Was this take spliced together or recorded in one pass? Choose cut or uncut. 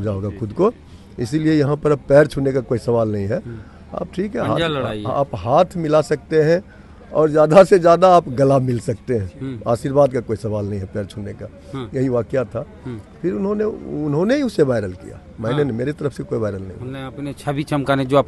uncut